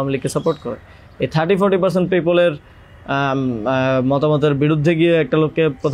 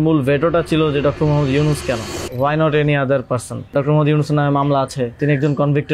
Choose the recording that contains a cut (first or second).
second